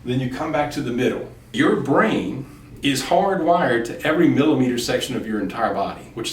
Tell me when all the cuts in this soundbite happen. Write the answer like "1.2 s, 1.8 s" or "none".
1.5 s